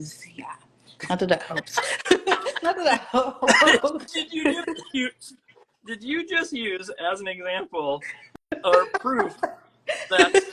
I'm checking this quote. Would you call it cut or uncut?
uncut